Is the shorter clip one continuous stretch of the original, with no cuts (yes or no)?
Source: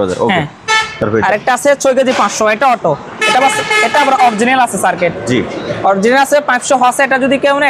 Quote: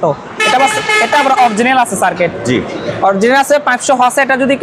yes